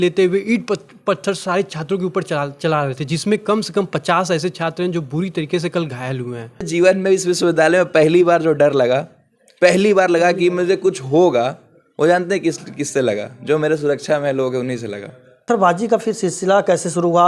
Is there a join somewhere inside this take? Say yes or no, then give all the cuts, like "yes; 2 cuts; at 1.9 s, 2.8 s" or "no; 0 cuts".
yes; 2 cuts; at 6.7 s, 15.4 s